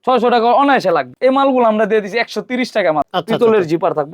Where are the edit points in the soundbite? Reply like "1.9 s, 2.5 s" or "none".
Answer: 1.1 s, 3.1 s